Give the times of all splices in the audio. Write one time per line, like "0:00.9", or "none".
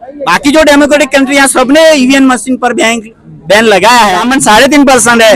0:04.2